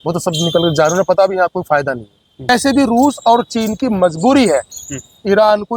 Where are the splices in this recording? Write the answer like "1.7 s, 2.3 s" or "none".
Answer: 2.5 s